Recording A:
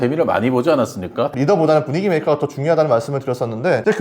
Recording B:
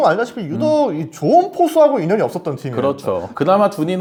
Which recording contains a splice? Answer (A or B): A